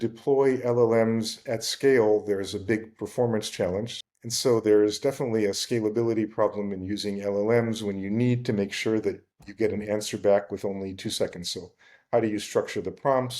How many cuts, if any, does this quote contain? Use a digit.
1